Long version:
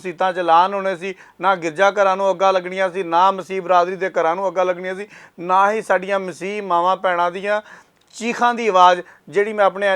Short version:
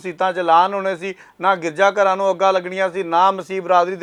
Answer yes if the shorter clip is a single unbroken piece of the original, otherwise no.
yes